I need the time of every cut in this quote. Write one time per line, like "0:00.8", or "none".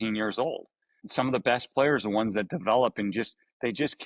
0:01.0